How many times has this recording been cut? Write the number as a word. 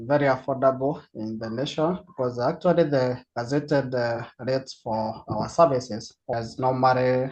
one